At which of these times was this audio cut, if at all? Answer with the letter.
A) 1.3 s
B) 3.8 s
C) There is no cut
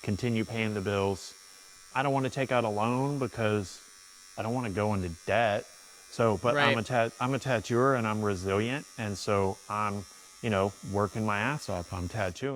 C